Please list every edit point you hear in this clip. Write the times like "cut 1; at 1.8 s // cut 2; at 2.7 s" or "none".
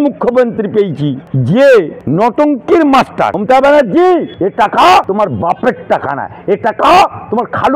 cut 1; at 1.3 s // cut 2; at 2.0 s // cut 3; at 3.4 s // cut 4; at 4.3 s // cut 5; at 5.1 s